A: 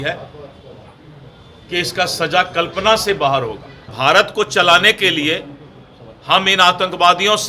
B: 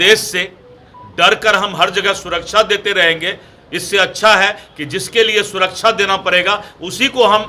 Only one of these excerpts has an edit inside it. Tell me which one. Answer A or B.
A